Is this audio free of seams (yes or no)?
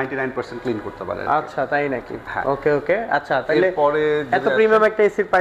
yes